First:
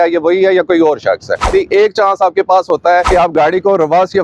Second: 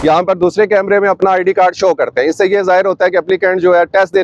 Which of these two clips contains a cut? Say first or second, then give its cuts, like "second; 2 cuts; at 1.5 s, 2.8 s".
first; 2 cuts; at 1.4 s, 3.1 s